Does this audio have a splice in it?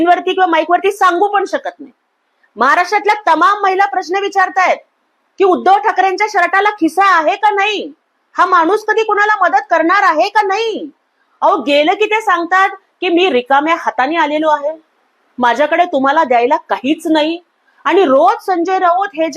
no; 0 cuts

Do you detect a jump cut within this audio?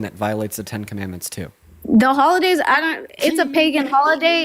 no; 0 cuts

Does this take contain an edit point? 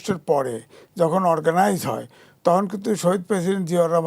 no; 0 cuts

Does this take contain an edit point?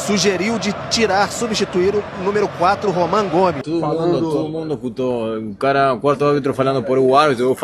yes; 1 cut; at 3.6 s

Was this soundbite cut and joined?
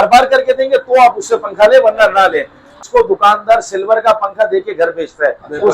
yes; 1 cut; at 2.8 s

